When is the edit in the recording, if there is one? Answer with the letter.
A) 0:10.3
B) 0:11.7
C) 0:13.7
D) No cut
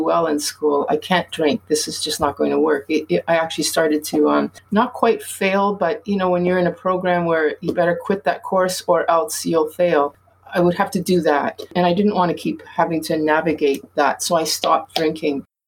B